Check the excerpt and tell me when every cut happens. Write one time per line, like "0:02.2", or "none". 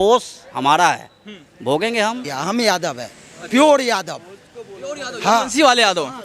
0:02.3